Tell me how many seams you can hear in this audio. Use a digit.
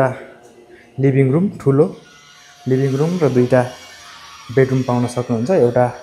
0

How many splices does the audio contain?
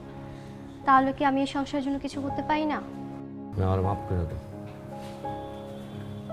1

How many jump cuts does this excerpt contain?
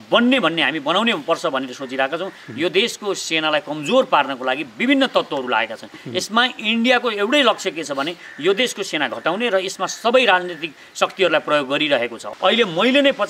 1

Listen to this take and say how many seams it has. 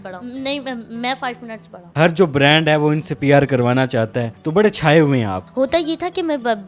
2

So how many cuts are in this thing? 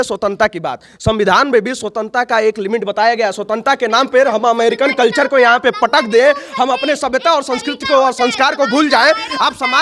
0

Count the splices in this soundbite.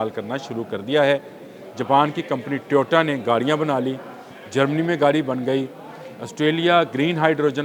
0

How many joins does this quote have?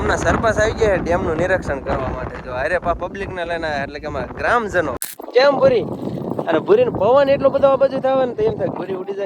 1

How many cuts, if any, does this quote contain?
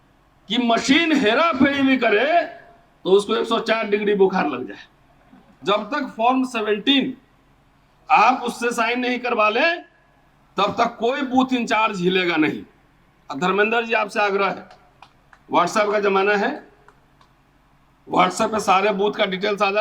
1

